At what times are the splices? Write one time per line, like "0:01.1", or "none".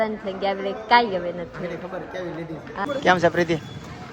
0:02.8